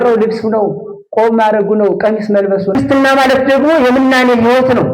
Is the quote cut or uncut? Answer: cut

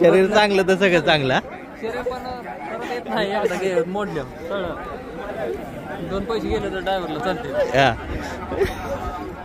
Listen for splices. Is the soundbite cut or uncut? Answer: uncut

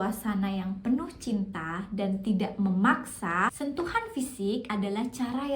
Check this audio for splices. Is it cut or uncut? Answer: cut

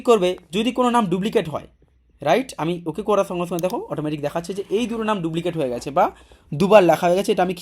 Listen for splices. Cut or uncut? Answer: uncut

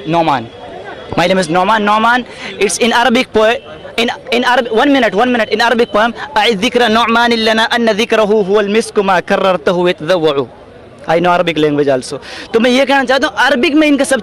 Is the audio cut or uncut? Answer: uncut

